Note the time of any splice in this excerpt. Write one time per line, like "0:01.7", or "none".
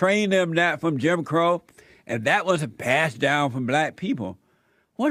none